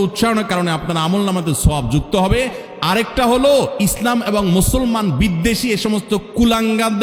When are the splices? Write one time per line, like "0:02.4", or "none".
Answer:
none